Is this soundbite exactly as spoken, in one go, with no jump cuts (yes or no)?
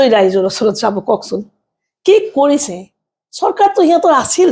yes